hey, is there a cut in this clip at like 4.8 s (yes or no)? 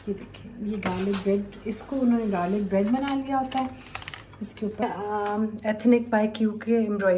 yes